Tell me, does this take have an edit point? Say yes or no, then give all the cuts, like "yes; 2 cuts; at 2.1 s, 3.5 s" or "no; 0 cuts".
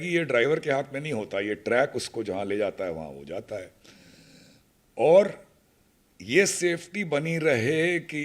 no; 0 cuts